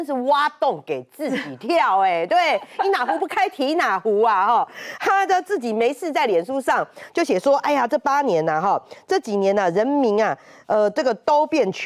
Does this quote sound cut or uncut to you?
uncut